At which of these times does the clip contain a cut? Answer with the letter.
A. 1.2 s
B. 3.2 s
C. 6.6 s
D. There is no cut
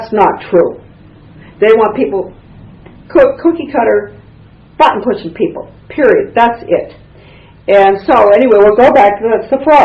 B